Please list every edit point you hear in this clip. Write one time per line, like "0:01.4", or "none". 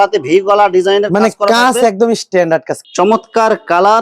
0:02.8

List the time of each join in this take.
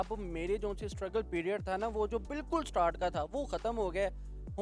none

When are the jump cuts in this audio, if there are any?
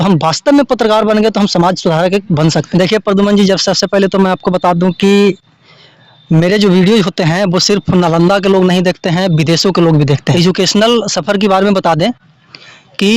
0:02.6
0:10.3

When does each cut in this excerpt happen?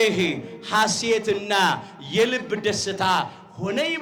none

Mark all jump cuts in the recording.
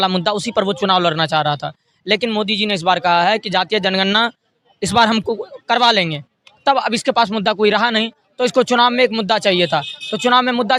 none

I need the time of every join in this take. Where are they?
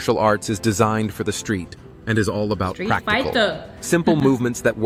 none

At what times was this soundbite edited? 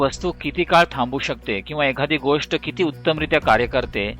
none

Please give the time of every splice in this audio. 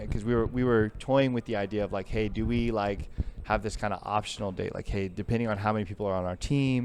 none

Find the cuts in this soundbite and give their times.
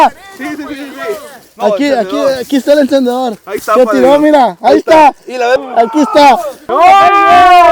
0:05.6
0:06.6

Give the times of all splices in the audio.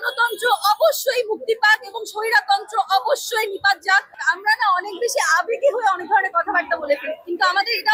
none

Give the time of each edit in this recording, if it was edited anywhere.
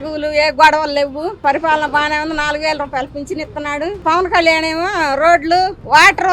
0:01.4
0:04.0

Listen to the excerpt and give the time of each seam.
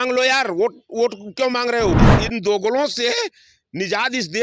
0:01.9

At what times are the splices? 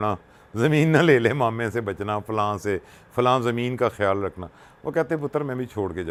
none

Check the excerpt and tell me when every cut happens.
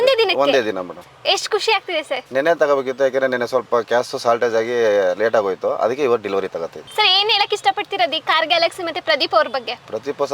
0:06.8

